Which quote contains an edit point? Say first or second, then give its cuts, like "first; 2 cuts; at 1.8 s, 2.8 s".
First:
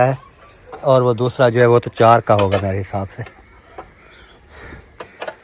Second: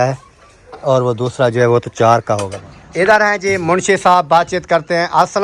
second; 1 cut; at 2.5 s